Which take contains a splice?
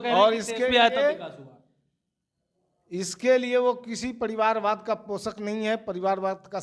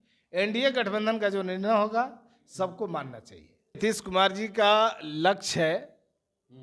second; 1 cut; at 3.8 s

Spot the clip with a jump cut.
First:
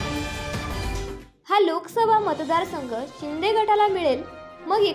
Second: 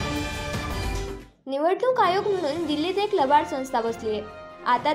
second; 1 cut; at 1.2 s

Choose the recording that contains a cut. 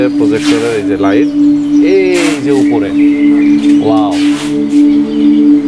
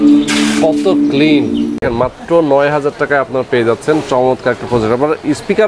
second; 1 cut; at 1.8 s

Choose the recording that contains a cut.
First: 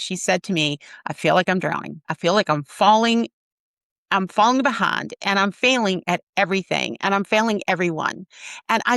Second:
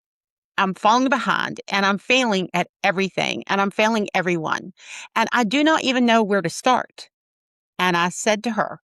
first; 1 cut; at 2.1 s

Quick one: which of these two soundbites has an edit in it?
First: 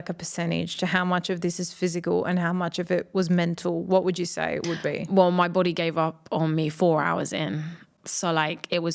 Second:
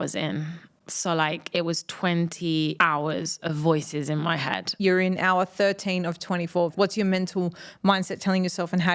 second; 3 cuts; at 2.7 s, 4.7 s, 6.7 s

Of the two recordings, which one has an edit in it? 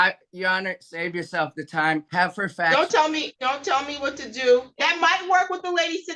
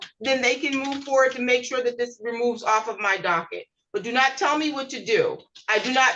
first; 3 cuts; at 2.1 s, 3.3 s, 4.7 s

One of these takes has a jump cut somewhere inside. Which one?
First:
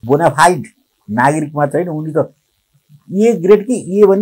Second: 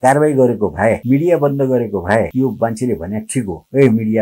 second; 2 cuts; at 1.0 s, 2.3 s

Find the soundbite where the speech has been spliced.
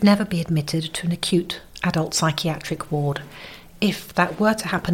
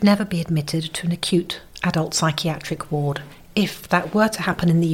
second; 1 cut; at 3.3 s

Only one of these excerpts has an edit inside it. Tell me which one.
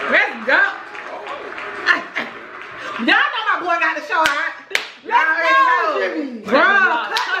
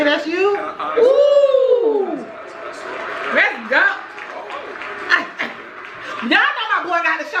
first; 1 cut; at 6.5 s

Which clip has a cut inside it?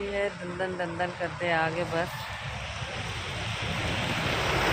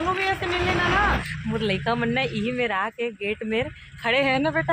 second; 1 cut; at 1.2 s

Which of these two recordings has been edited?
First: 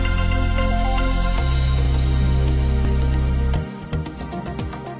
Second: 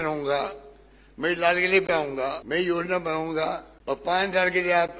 second; 2 cuts; at 2.4 s, 3.7 s

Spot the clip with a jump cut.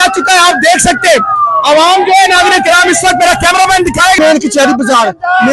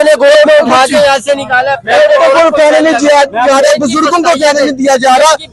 first; 1 cut; at 4.2 s

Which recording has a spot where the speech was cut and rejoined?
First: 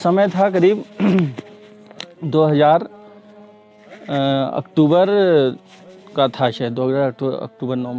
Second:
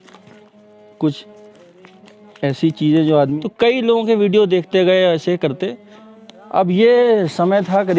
second; 1 cut; at 3.3 s

